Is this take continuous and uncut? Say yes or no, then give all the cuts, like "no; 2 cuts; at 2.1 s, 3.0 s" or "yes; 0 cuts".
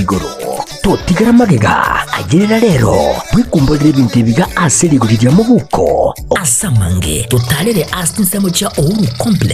yes; 0 cuts